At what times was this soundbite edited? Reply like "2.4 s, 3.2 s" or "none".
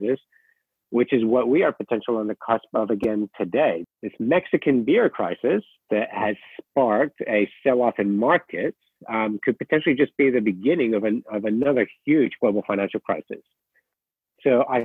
3.8 s